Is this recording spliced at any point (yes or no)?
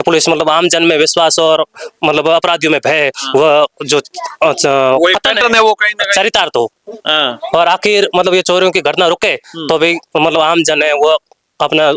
no